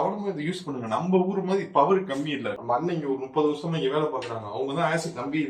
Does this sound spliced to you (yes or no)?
yes